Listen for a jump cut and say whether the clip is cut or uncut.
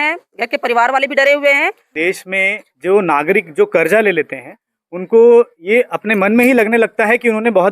cut